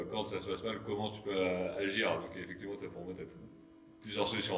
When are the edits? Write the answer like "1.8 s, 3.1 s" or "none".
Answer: none